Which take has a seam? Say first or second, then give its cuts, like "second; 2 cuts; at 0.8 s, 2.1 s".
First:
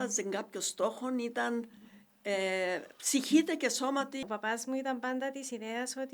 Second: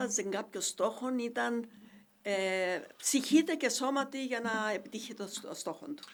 first; 1 cut; at 4.2 s